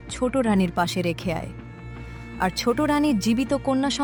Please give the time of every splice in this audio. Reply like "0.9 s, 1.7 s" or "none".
none